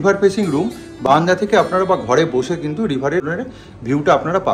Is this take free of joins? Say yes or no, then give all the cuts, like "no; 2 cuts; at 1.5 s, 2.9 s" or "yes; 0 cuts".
no; 1 cut; at 3.3 s